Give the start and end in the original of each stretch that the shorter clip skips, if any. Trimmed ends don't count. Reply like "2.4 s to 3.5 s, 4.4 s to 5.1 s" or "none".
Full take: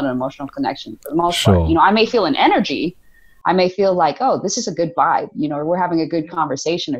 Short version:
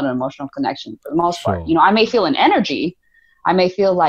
none